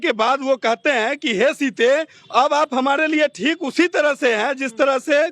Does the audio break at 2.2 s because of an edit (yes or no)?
yes